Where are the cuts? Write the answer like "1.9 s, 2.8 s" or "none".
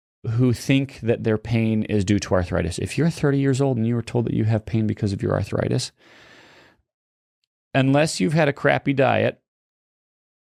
none